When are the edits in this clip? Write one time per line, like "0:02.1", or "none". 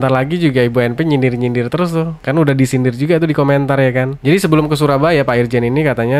0:04.1